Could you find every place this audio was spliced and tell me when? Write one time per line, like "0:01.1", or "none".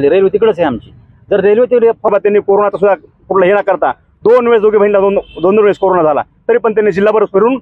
0:02.1

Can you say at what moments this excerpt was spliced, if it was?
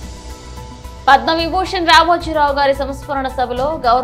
none

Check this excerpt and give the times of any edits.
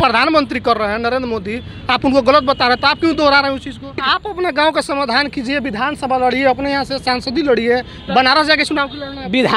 0:04.1

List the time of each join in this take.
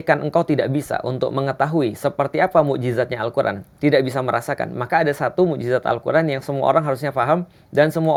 none

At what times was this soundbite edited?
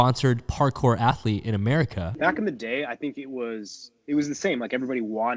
0:02.1

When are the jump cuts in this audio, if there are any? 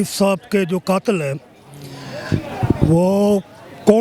none

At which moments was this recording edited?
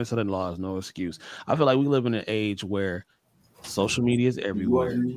none

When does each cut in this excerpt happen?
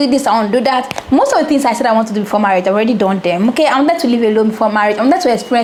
none

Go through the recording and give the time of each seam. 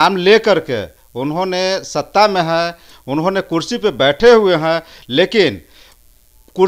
none

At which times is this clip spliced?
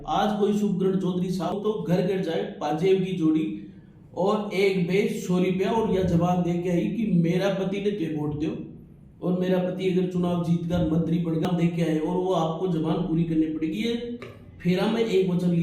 0:01.5
0:11.5

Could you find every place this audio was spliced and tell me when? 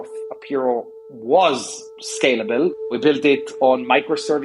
0:02.7

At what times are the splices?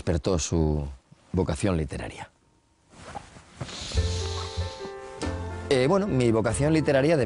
none

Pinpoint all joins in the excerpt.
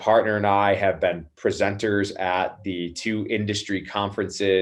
none

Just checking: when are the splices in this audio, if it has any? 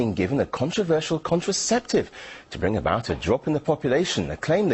0:03.3

